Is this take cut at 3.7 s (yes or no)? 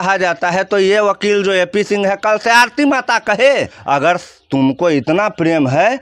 yes